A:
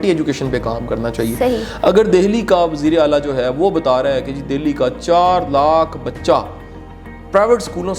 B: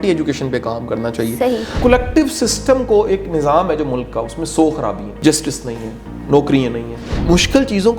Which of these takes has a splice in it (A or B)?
B